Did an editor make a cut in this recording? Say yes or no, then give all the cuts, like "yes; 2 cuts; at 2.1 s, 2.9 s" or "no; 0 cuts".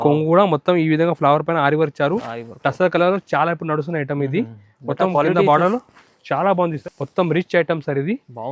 yes; 1 cut; at 6.8 s